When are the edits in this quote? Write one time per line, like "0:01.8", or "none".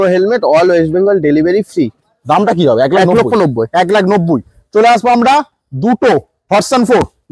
none

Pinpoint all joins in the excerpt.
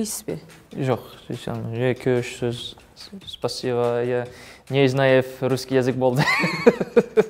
none

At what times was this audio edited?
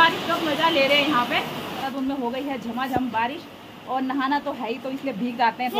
0:01.8

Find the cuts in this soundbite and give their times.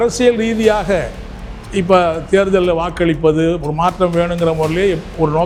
none

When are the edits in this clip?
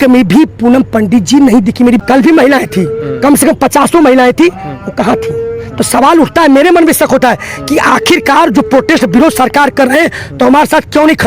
0:02.0

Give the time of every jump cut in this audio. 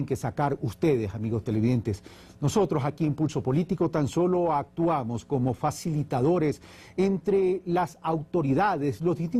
none

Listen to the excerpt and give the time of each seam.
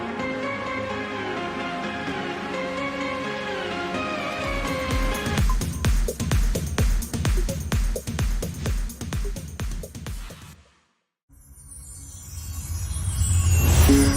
0:11.1

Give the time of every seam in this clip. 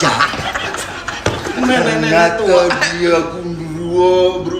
0:01.5

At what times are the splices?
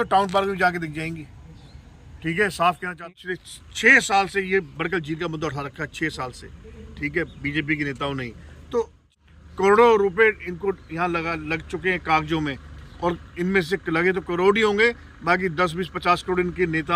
0:03.1
0:09.1

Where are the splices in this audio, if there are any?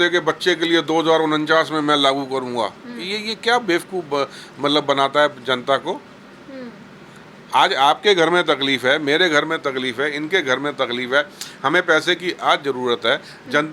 none

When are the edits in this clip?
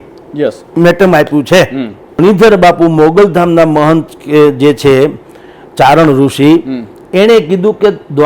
0:02.2

